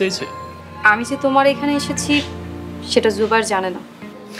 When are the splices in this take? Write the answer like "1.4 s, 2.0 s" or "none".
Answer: none